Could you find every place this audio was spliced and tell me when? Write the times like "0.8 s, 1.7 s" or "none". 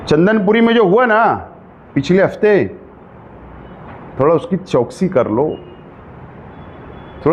none